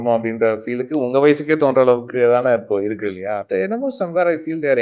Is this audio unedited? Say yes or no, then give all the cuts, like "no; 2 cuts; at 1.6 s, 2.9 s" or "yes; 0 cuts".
no; 1 cut; at 3.4 s